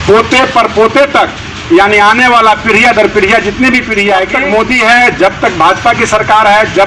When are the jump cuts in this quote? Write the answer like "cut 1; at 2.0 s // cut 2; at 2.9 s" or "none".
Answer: cut 1; at 4.4 s